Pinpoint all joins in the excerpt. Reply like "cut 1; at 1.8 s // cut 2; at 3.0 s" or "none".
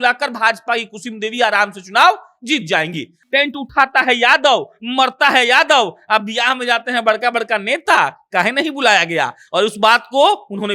cut 1; at 3.1 s